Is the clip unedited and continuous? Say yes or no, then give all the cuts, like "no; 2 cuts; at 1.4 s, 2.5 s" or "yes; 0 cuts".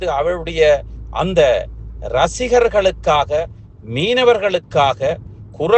yes; 0 cuts